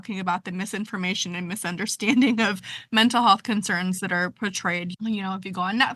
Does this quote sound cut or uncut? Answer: cut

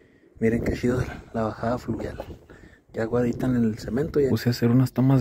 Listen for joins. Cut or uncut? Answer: cut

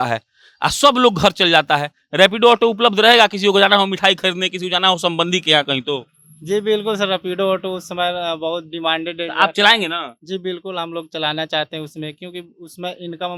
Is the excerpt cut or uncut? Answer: uncut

